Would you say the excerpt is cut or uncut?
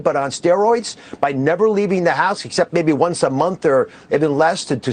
uncut